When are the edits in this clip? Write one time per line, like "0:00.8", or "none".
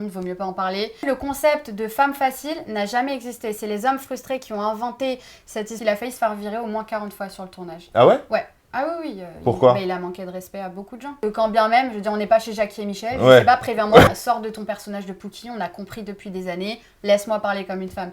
0:01.0
0:05.8
0:11.2
0:14.1